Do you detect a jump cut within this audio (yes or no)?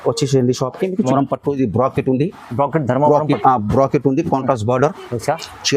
yes